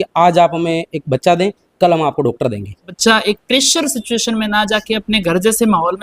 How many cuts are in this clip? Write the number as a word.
one